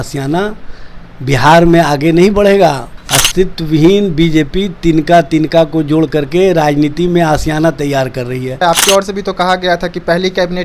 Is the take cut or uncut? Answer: cut